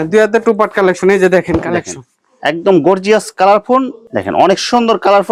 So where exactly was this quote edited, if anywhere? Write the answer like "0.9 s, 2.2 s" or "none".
none